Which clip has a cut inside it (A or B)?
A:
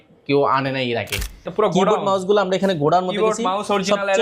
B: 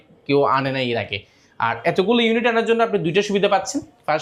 A